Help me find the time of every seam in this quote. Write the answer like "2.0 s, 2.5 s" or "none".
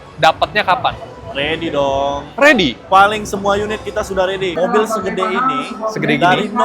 4.5 s

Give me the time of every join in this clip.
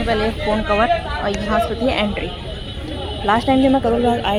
none

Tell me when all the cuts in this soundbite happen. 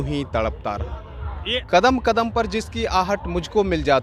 1.5 s

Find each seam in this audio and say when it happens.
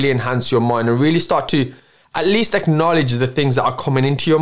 none

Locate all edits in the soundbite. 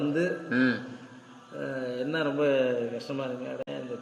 none

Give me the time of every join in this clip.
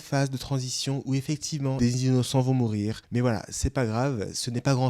1.8 s, 3.0 s

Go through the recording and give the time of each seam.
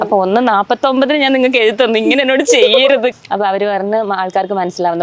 3.2 s

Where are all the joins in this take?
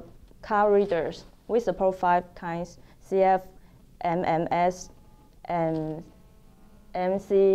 none

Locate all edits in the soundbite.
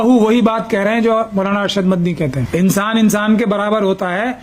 2.4 s

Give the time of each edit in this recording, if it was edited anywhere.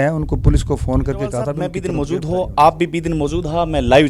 1.8 s

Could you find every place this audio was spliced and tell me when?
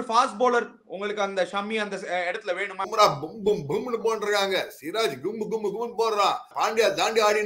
2.9 s, 6.5 s

